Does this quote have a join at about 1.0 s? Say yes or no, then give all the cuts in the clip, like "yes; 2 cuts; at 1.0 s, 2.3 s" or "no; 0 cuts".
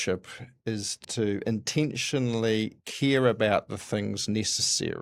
yes; 1 cut; at 1.0 s